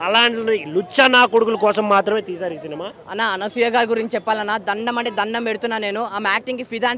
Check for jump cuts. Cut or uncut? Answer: cut